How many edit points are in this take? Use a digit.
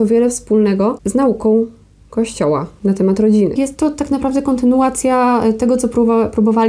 2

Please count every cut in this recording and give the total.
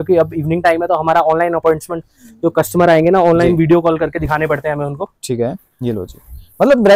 0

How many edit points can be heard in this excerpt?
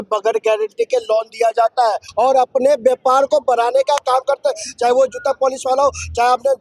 1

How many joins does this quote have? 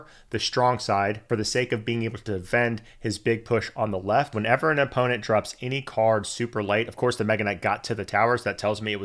2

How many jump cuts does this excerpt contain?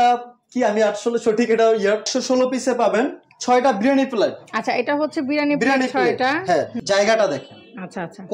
2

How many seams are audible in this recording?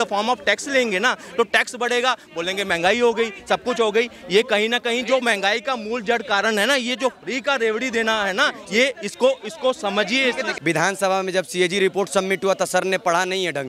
1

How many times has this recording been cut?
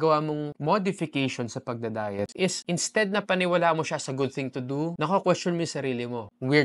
1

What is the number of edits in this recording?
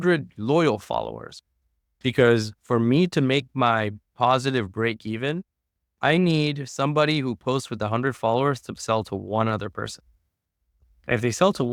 0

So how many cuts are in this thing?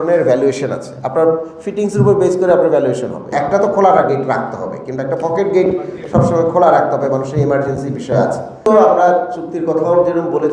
2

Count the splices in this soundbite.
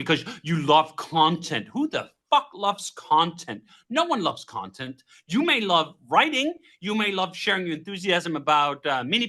0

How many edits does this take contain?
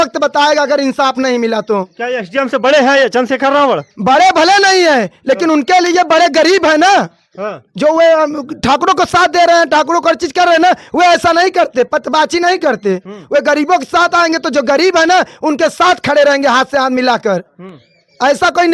0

